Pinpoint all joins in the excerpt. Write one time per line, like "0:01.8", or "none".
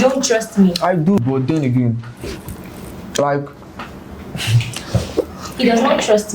0:01.2

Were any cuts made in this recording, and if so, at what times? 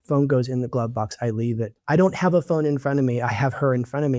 0:01.7

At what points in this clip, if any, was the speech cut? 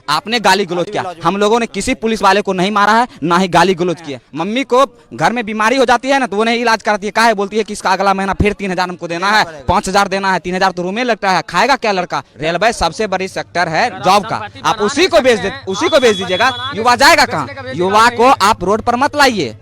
0:04.2
0:12.3

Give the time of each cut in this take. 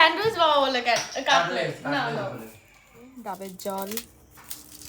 0:03.1

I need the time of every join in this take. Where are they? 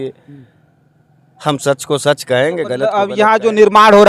0:03.1

